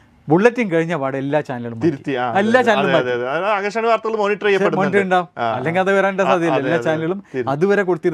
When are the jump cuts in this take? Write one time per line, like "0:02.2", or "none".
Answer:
none